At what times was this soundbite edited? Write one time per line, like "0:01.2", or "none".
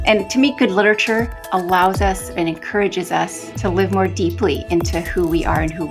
0:01.4
0:03.4